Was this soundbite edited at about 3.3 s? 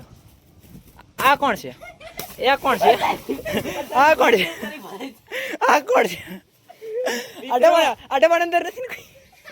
yes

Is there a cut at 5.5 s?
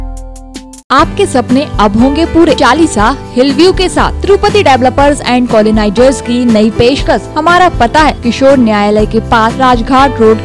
no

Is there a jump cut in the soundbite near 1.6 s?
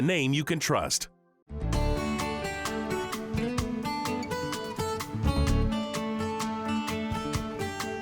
yes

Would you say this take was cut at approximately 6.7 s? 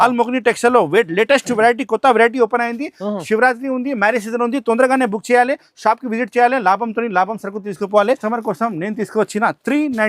no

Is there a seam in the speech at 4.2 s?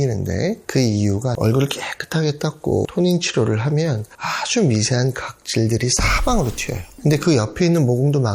no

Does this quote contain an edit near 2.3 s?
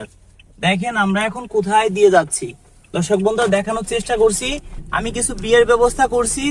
no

